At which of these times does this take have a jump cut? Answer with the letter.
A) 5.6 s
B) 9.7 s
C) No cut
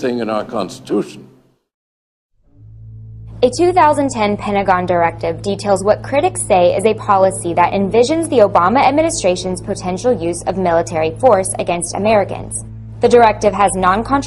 B